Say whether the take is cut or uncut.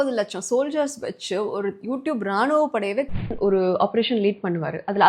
cut